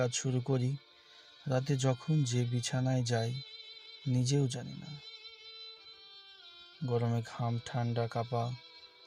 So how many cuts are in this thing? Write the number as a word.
zero